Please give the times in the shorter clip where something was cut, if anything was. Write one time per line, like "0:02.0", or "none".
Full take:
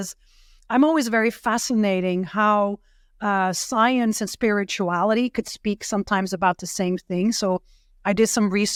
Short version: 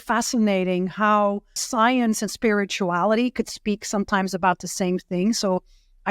0:01.6

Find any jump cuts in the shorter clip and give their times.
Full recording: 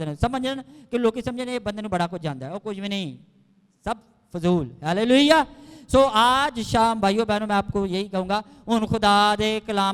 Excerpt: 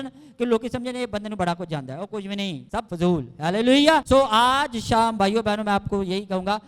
0:02.7
0:04.0

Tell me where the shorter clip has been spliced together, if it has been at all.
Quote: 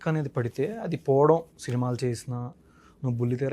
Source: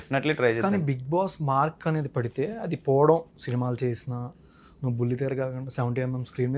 none

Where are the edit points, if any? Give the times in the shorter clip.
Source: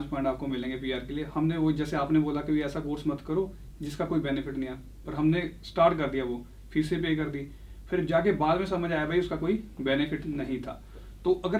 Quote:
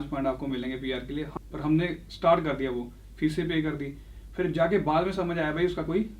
0:01.3

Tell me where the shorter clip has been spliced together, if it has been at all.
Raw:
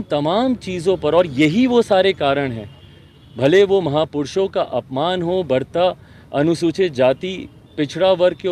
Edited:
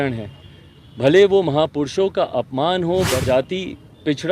0:03.2

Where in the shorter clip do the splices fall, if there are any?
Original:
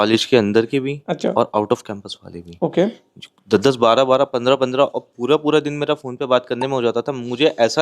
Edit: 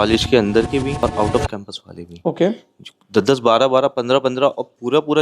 0:01.0

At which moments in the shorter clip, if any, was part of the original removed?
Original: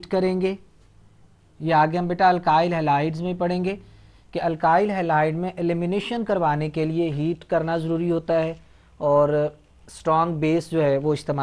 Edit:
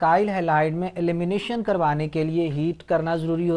none

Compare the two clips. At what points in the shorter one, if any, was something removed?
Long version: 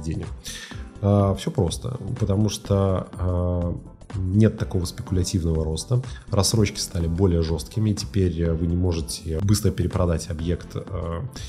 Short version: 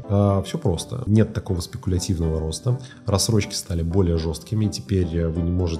0:00.9

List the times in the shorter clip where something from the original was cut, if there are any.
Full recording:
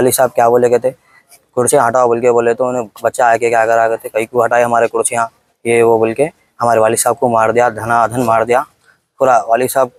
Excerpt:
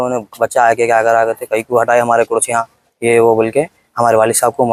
none

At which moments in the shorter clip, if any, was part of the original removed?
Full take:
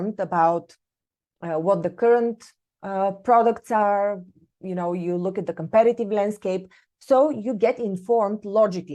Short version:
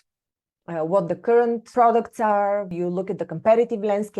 0:01.7
0:02.7

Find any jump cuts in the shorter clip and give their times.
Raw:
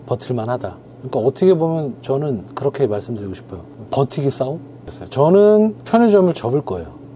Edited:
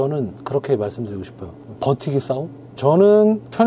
0:02.6

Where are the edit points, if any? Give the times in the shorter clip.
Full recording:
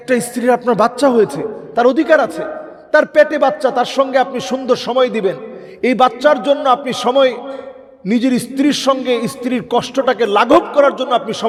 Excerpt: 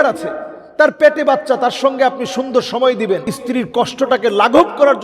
0:03.4

